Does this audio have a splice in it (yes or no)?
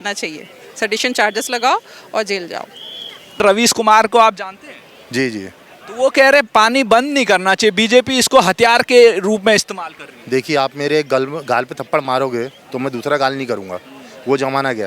yes